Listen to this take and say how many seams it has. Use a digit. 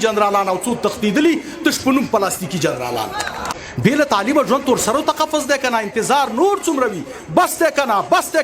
1